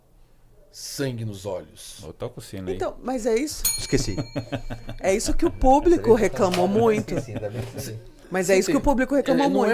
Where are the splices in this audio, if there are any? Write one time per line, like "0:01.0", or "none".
none